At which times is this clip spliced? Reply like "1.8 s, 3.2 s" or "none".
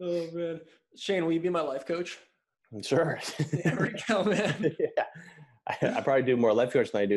none